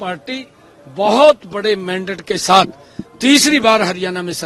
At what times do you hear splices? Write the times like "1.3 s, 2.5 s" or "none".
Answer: none